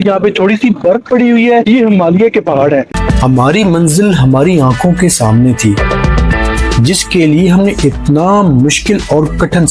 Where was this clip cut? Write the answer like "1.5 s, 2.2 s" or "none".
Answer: 2.9 s